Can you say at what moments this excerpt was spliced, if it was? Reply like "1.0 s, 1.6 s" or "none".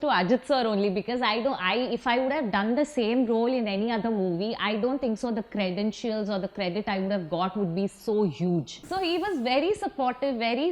8.8 s

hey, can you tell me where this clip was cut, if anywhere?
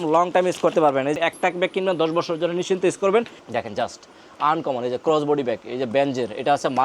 1.2 s, 3.4 s

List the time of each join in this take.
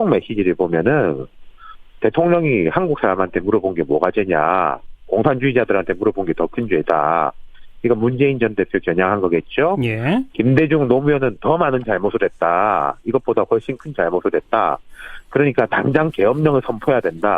11.6 s

